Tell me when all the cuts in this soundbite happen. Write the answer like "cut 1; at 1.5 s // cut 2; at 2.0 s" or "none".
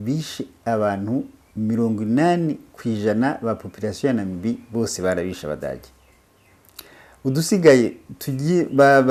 none